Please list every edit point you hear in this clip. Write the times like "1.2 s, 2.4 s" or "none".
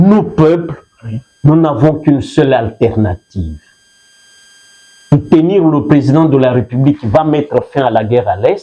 none

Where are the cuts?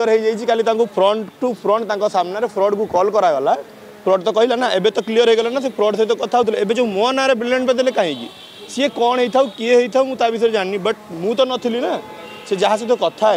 none

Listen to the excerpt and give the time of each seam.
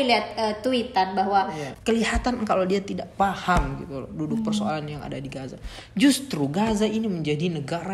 1.6 s

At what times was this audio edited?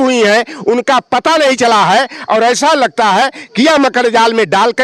none

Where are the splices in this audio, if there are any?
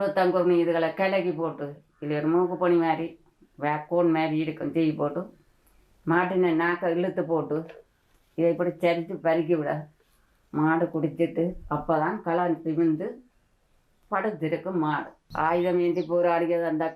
15.2 s

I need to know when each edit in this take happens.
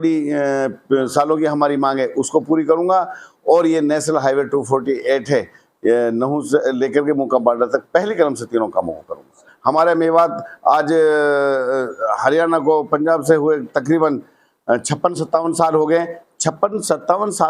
9.5 s

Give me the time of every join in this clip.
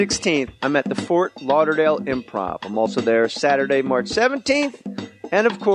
1.4 s

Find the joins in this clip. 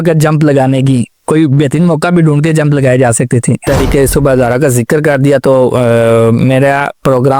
3.6 s

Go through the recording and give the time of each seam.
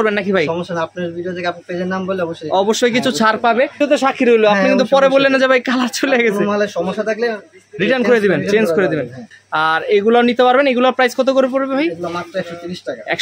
3.8 s, 9.3 s

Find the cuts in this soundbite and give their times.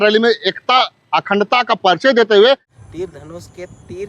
2.7 s

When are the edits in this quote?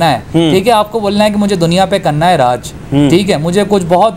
none

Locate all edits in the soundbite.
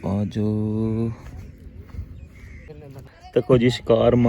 2.7 s

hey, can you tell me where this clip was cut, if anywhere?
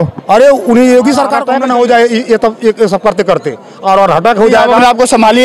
1.4 s

